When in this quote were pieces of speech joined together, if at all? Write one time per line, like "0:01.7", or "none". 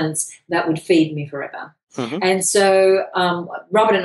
none